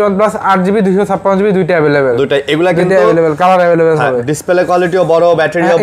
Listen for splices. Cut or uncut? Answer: uncut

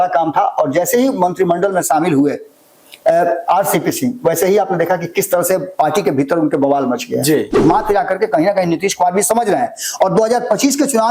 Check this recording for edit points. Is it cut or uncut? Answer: cut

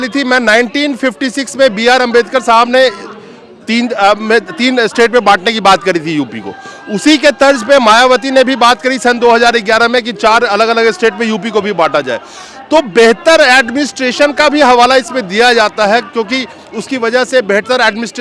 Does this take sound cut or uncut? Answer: uncut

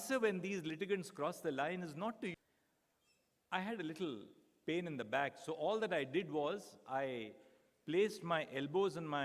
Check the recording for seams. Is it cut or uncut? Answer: cut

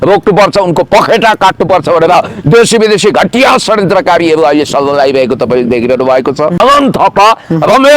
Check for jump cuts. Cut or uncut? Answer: cut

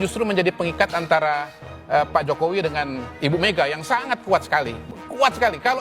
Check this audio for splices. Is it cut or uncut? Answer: cut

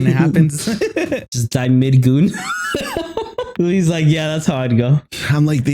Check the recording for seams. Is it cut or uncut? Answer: cut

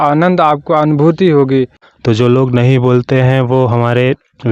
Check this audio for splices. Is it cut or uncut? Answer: cut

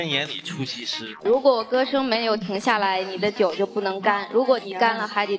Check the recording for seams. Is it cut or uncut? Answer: cut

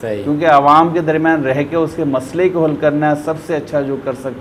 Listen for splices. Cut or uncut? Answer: uncut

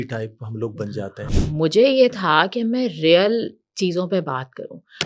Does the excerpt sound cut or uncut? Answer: cut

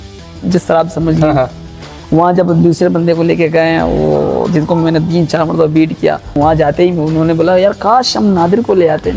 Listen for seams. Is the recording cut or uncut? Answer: cut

